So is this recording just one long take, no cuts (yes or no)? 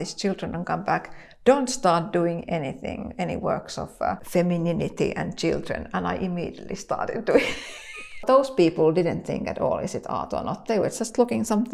no